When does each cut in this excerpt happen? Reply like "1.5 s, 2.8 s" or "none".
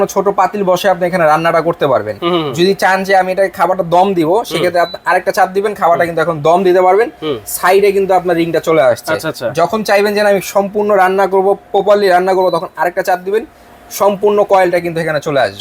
none